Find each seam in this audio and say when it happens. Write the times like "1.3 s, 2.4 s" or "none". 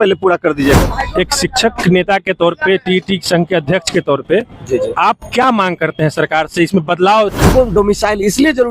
0.8 s, 7.5 s